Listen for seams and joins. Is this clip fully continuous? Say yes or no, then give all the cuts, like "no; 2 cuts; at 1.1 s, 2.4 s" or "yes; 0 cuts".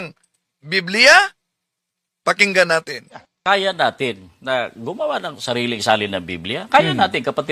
no; 1 cut; at 3.3 s